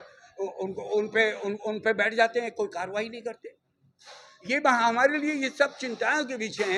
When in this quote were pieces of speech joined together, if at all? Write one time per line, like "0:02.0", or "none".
none